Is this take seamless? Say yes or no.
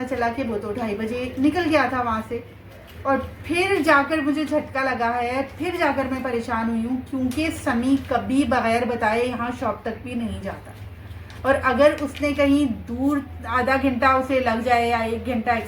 yes